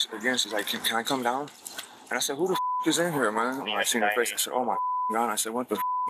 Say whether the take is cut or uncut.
cut